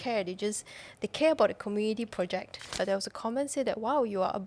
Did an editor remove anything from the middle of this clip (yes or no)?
yes